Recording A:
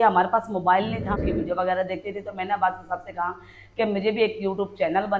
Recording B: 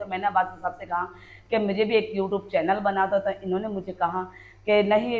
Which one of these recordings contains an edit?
A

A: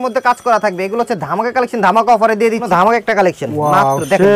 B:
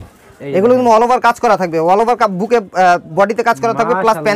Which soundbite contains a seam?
A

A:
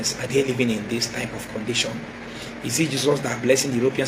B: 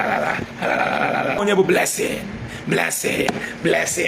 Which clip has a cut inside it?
B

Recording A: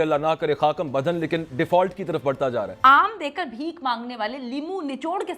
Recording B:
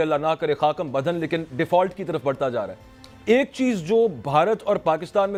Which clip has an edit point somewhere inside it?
A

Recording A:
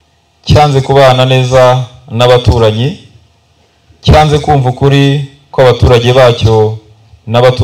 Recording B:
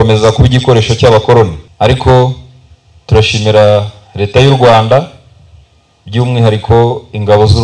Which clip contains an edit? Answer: B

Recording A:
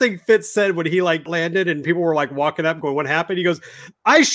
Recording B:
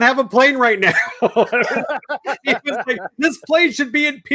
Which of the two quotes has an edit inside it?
A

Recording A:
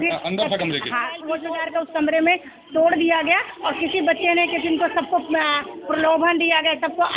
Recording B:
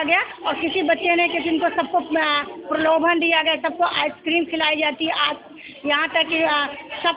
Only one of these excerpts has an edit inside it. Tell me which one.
A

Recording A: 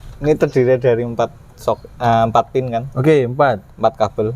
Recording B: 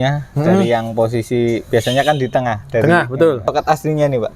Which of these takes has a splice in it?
B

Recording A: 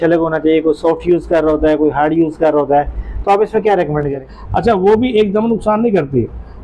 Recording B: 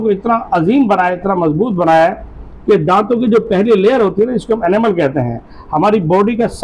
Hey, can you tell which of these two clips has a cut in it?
A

